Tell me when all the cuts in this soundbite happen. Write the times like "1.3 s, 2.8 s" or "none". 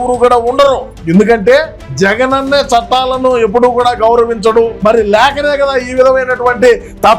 0.9 s, 1.8 s, 4.7 s